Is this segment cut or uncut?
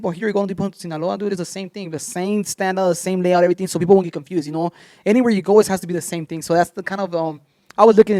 uncut